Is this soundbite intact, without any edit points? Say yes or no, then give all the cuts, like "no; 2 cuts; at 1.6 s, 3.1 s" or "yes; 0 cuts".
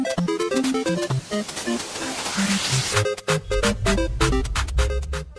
yes; 0 cuts